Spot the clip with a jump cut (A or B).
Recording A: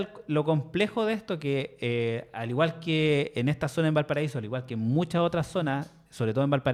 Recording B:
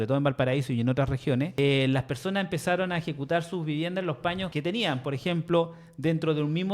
B